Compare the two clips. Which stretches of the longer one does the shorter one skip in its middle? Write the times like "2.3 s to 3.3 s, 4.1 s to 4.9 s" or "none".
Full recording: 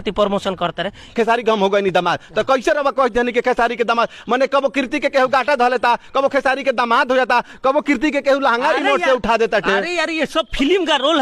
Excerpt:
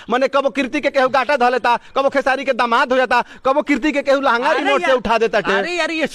none

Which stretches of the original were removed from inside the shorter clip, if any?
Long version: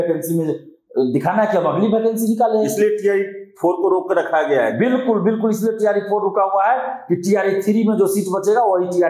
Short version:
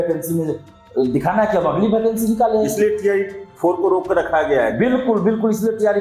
none

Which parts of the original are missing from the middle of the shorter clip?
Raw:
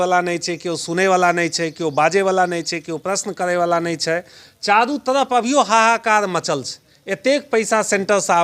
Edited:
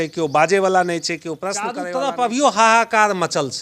3.4 s to 5.0 s

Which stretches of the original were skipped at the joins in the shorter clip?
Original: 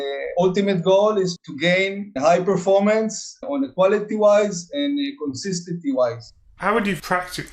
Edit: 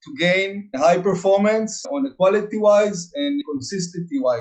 3.2 s to 3.4 s, 5.0 s to 5.1 s

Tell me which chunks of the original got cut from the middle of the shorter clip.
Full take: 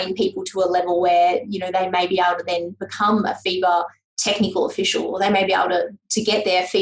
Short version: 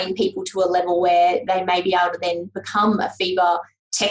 1.4 s to 1.7 s

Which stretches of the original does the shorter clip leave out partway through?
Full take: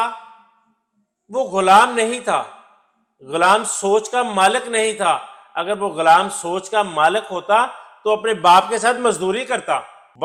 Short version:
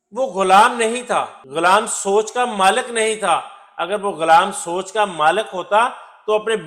2.6 s to 3.2 s

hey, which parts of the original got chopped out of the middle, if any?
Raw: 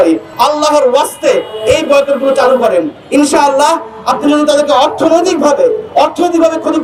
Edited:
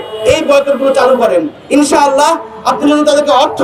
none

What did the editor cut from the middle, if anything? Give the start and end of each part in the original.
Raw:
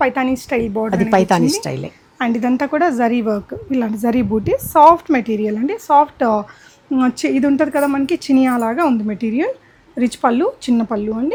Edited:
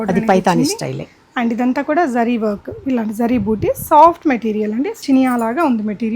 5.8 s to 8.2 s

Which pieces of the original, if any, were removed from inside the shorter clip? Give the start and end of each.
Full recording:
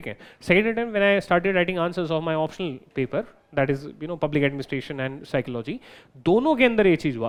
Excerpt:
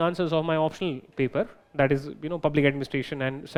none

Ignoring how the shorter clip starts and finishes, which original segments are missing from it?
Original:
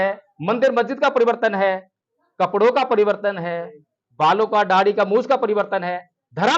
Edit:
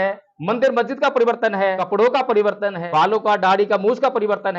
1.8 s to 2.4 s, 3.4 s to 4.1 s

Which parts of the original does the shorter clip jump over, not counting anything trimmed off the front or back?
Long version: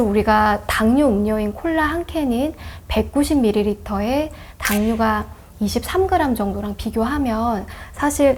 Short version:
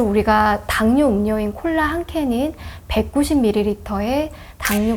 none

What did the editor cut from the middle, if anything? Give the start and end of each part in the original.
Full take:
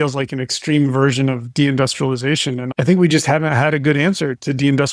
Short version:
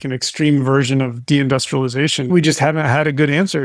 2.6 s to 3.0 s

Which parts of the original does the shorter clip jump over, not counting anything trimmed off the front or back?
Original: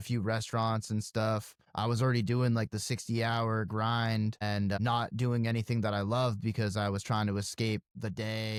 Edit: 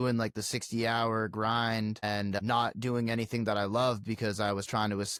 none

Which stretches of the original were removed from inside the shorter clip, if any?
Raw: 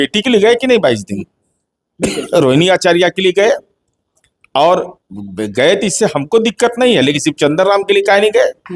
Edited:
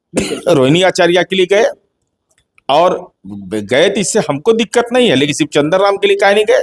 none

